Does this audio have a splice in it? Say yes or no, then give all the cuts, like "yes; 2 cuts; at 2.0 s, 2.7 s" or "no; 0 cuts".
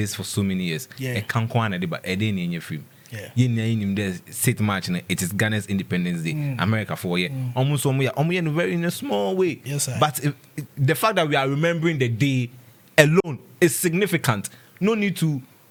no; 0 cuts